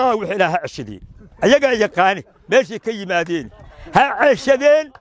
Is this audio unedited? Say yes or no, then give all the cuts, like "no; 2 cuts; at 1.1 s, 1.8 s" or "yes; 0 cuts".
yes; 0 cuts